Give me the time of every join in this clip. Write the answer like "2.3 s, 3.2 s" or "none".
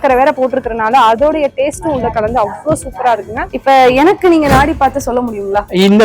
3.5 s